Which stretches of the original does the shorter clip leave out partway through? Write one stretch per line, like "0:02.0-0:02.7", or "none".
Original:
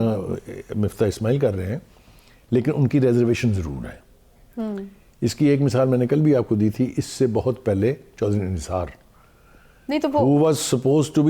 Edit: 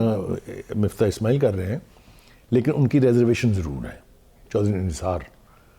0:04.4-0:08.1